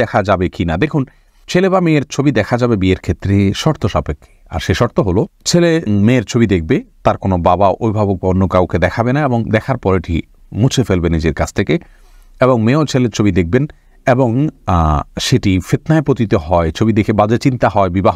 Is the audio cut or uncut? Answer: uncut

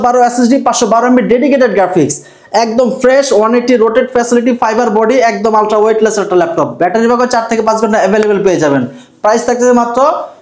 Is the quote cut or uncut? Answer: uncut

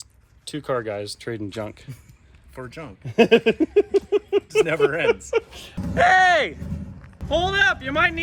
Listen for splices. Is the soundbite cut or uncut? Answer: cut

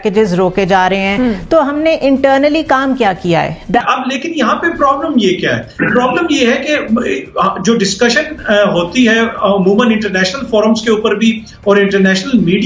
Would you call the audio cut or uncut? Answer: uncut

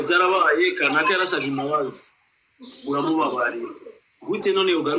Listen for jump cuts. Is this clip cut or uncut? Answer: uncut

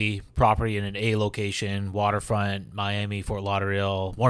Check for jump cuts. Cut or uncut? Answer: uncut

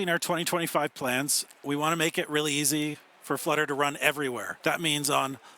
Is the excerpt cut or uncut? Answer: cut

